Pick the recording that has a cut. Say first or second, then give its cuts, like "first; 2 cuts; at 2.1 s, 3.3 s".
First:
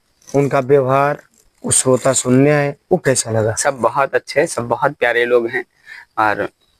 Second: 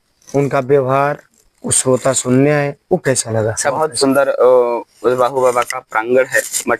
second; 1 cut; at 3.8 s